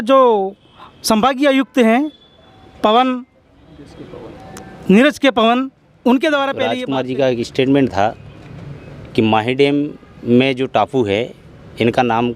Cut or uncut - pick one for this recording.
cut